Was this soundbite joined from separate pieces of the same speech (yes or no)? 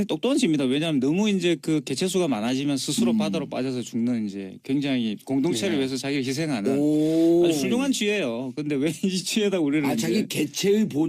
yes